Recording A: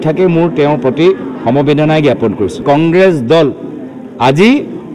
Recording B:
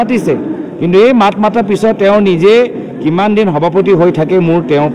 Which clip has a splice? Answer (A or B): A